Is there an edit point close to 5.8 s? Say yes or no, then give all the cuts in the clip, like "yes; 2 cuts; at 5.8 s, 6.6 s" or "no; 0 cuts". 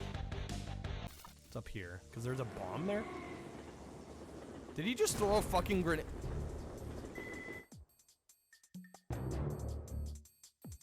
no; 1 cut; at 1.0 s